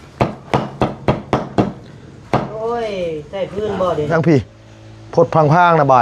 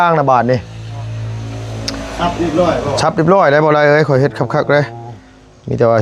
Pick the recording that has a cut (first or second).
first